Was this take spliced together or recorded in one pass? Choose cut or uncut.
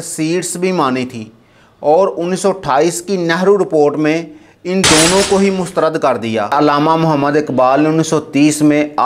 cut